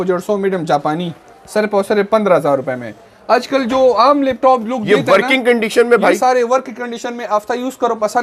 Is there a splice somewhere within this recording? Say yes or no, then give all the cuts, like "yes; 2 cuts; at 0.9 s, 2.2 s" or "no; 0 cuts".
no; 0 cuts